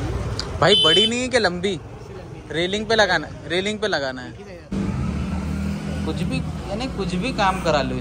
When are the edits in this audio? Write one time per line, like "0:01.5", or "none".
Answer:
0:04.7